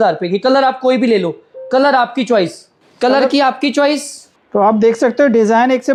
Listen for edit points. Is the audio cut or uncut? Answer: uncut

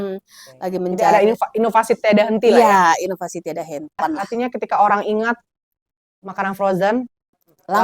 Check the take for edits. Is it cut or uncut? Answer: cut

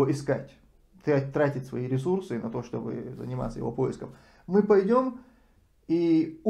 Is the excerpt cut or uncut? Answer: uncut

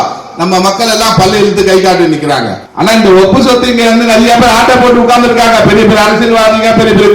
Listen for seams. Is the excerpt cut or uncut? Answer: cut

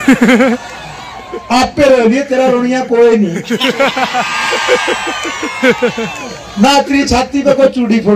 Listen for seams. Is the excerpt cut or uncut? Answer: uncut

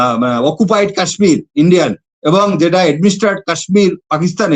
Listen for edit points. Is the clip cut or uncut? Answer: uncut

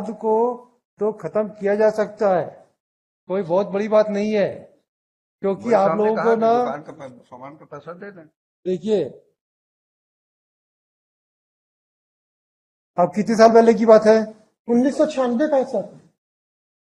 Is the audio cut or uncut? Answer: uncut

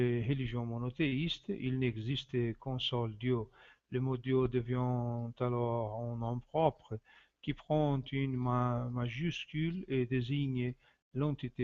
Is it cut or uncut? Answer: uncut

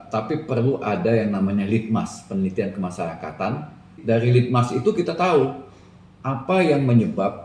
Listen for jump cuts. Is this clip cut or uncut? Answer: cut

